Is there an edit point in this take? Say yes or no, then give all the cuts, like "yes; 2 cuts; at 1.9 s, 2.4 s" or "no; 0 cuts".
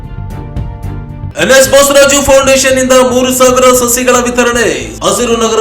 yes; 1 cut; at 1.3 s